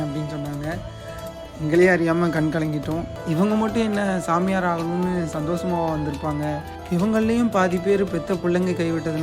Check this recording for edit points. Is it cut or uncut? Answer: cut